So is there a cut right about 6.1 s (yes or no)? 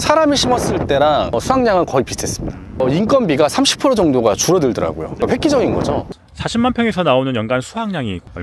yes